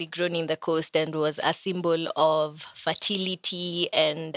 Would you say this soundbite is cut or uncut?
uncut